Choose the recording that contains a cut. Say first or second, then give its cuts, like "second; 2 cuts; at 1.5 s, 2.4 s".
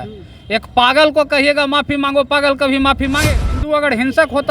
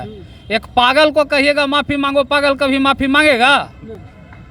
first; 1 cut; at 3.3 s